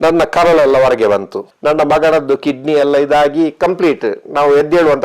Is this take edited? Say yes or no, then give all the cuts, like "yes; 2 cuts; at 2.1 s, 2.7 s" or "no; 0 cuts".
no; 0 cuts